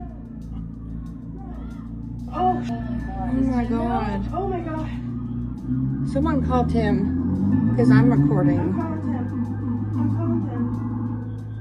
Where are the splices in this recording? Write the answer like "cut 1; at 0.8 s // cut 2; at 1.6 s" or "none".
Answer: cut 1; at 2.7 s